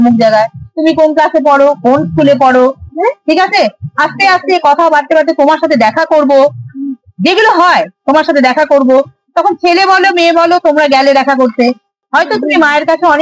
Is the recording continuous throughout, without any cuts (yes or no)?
no